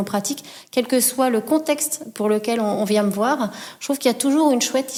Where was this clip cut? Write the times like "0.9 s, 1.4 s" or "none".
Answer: none